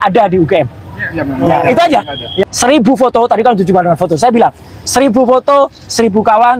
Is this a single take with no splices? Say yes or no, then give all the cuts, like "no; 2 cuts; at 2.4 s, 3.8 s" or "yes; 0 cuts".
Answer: no; 1 cut; at 2.4 s